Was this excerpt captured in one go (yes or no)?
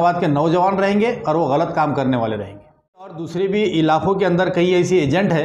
no